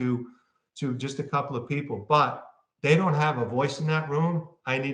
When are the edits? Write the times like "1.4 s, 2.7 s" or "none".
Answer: none